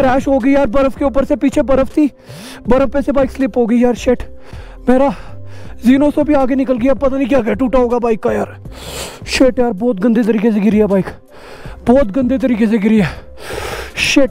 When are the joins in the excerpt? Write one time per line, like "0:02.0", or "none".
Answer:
none